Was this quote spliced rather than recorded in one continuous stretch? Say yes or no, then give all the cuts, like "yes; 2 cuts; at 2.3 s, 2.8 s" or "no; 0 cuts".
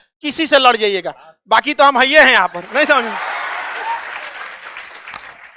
no; 0 cuts